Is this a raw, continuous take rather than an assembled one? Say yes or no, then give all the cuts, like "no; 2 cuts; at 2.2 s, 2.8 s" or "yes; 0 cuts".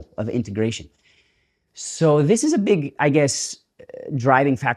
yes; 0 cuts